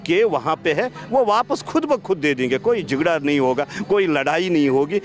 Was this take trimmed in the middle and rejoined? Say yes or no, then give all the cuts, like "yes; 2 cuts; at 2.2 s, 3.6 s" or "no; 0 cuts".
no; 0 cuts